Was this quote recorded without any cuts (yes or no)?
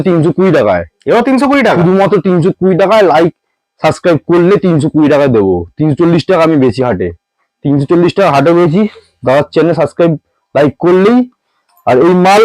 yes